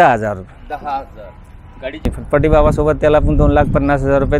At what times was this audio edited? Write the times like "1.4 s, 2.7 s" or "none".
2.1 s